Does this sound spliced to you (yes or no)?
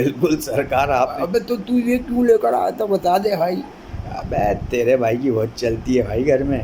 yes